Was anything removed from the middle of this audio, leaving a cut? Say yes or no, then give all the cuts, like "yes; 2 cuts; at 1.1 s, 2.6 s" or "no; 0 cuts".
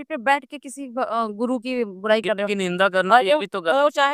no; 0 cuts